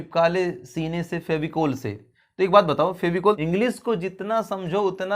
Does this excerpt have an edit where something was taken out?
yes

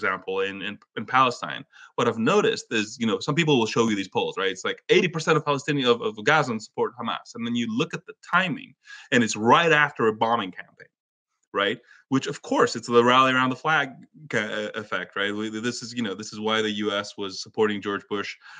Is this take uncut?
yes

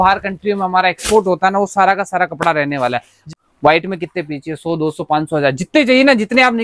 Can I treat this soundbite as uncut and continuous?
no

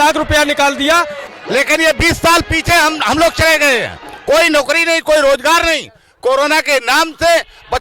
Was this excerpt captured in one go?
no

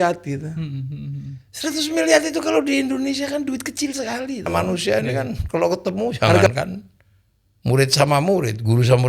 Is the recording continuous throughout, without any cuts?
no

